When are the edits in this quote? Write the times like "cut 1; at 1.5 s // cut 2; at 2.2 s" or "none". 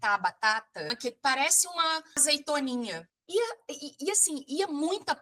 cut 1; at 0.9 s // cut 2; at 2.2 s